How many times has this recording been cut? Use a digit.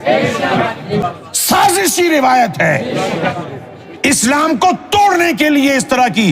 1